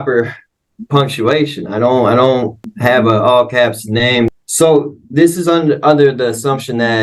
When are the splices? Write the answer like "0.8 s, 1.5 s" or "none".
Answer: 2.8 s, 4.3 s